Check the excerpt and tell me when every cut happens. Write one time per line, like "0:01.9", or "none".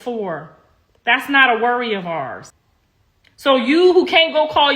0:02.5